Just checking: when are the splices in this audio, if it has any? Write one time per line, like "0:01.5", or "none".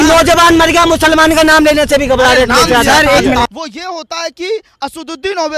0:03.5